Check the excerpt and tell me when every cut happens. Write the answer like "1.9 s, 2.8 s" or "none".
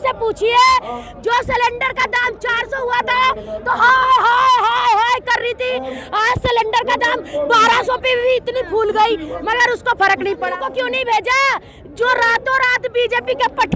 10.5 s

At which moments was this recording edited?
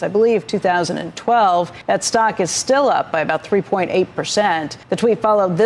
1.8 s, 4.7 s

